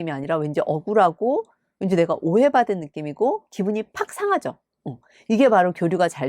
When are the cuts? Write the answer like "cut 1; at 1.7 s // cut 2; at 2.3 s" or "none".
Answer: none

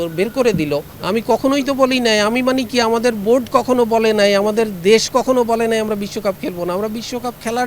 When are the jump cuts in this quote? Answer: cut 1; at 0.9 s

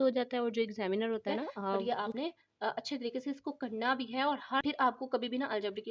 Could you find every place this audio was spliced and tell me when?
cut 1; at 1.8 s // cut 2; at 4.6 s

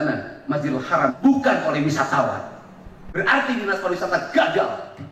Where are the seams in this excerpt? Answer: cut 1; at 1.1 s

